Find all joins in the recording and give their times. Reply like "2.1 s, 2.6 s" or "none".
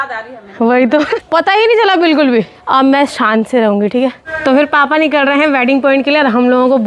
1.1 s, 2.6 s, 4.3 s